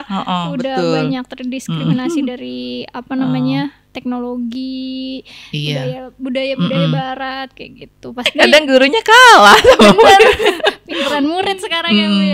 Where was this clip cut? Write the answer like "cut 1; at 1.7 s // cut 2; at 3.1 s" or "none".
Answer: cut 1; at 8.2 s